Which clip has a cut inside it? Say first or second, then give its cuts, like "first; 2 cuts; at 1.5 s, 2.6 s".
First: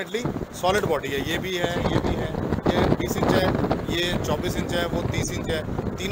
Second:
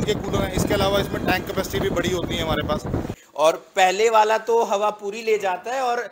second; 1 cut; at 3.2 s